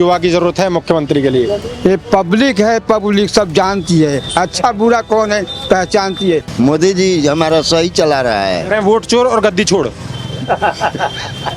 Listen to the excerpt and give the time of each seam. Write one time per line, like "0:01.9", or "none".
0:06.5